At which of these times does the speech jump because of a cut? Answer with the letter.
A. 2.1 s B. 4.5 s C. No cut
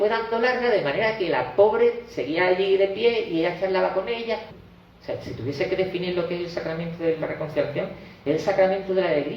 B